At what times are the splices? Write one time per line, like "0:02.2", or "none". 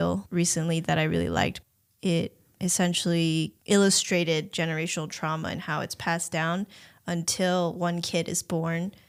none